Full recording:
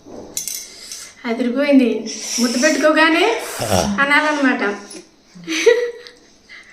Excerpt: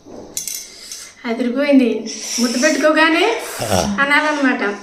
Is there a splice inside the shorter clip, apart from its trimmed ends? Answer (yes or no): no